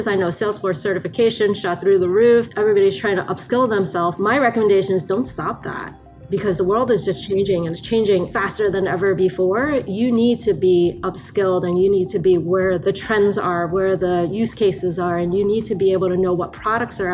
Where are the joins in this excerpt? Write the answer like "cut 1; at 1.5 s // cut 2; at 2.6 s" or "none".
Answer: cut 1; at 2.5 s // cut 2; at 7.8 s // cut 3; at 12.8 s